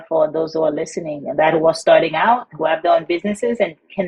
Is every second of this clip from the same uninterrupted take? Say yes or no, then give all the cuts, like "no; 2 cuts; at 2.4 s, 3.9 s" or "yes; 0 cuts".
no; 1 cut; at 2.5 s